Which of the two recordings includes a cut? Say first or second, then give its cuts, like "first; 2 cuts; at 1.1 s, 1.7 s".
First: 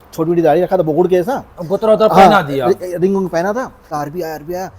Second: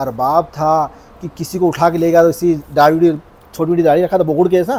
first; 1 cut; at 3.8 s